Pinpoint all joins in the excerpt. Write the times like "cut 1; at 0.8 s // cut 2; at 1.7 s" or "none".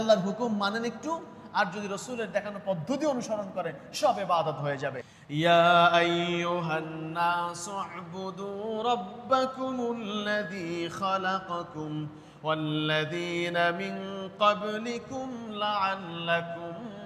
cut 1; at 5.1 s